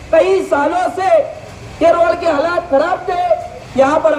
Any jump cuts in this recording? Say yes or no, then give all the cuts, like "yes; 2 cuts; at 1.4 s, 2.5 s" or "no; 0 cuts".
no; 0 cuts